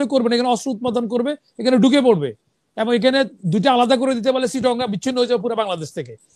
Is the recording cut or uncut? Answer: uncut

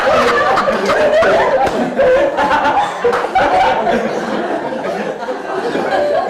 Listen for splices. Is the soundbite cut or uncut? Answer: uncut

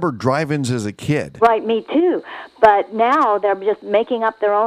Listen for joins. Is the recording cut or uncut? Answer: uncut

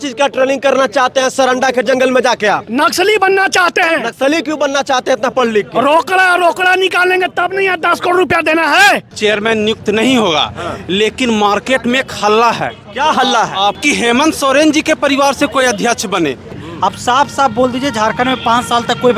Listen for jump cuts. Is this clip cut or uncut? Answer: cut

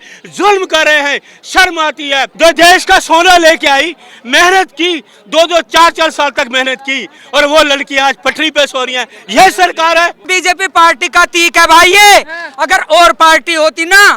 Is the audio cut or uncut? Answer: cut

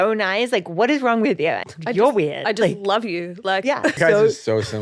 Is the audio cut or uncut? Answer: cut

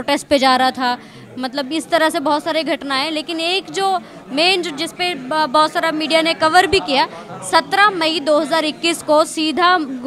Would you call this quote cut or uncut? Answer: uncut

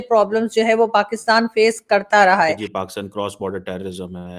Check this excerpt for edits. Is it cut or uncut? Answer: cut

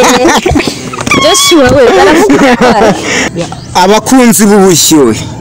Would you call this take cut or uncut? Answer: cut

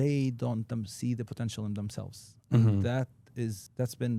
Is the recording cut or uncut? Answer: uncut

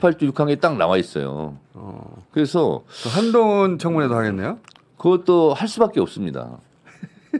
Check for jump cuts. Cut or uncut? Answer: uncut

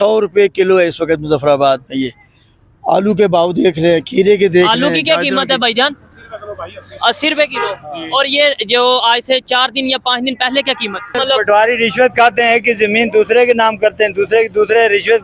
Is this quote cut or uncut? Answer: cut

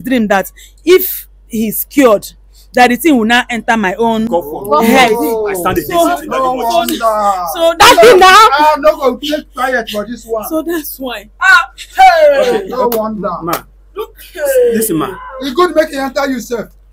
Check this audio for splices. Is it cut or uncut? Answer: uncut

